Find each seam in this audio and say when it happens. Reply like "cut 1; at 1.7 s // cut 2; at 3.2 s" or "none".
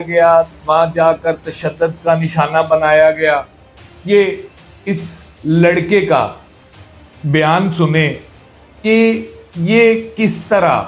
none